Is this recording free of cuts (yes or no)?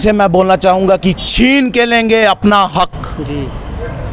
yes